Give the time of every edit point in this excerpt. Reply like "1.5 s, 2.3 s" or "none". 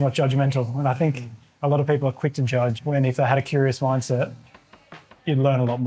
2.8 s